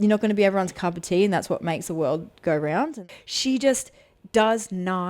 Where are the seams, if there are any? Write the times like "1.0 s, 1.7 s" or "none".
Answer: 3.0 s